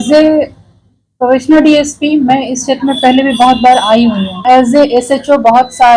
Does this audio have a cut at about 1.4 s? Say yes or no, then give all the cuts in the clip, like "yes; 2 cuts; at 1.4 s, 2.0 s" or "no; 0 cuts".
no; 1 cut; at 4.4 s